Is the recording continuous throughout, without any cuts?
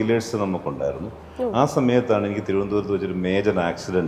yes; 0 cuts

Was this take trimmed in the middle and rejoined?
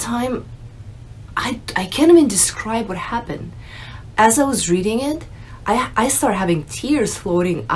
no; 0 cuts

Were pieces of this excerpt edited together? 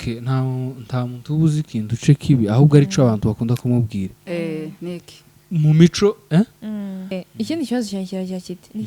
yes; 1 cut; at 7.2 s

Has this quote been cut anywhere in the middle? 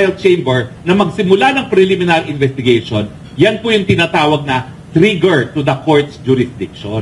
no; 0 cuts

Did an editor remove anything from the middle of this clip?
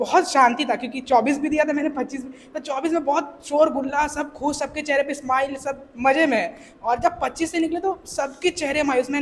no; 0 cuts

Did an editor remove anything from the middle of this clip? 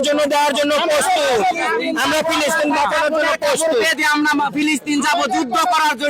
no; 0 cuts

